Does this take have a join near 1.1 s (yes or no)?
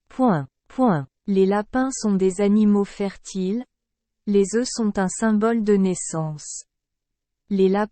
yes